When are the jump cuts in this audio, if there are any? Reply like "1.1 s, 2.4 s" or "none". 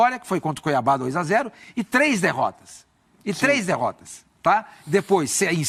none